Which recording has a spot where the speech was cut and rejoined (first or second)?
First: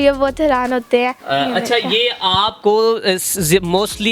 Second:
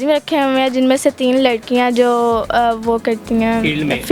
first